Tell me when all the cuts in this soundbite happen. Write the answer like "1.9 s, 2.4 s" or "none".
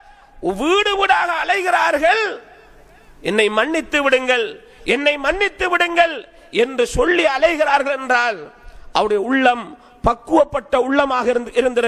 none